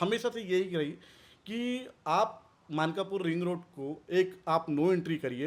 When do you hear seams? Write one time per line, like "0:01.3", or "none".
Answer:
none